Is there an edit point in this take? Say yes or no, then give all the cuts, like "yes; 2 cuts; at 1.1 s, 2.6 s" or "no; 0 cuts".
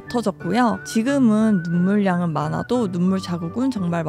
no; 0 cuts